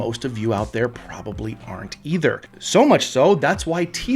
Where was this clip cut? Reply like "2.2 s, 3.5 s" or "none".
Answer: none